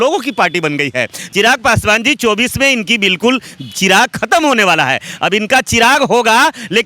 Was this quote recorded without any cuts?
no; 1 cut; at 1.2 s

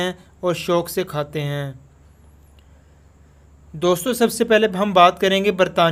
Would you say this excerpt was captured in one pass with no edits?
yes; 0 cuts

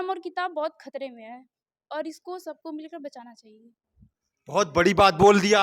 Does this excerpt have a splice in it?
no; 0 cuts

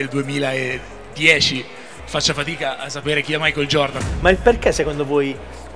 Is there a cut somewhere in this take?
yes; 1 cut; at 4.0 s

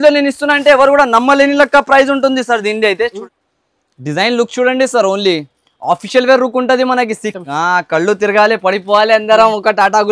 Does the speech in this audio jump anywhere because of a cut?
yes; 1 cut; at 3.2 s

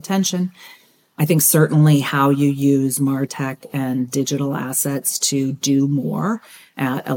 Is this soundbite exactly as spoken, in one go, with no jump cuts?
no; 1 cut; at 1.2 s

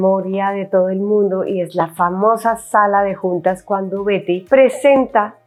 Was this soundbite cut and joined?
no; 0 cuts

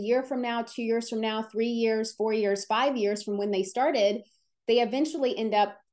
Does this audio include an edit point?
no; 0 cuts

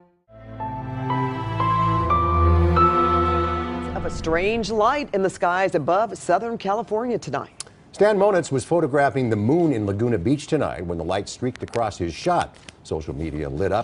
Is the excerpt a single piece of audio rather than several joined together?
yes; 0 cuts

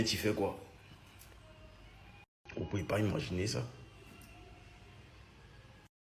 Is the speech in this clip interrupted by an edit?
no; 0 cuts

